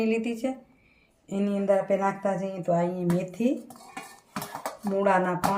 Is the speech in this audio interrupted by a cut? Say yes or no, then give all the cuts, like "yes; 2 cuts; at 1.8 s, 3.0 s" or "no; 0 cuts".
no; 0 cuts